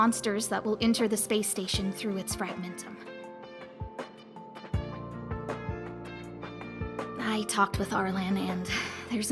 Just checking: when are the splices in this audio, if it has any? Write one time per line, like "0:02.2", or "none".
0:02.7
0:07.2